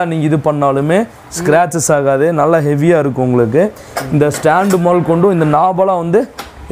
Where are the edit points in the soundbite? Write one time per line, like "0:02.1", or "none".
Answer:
none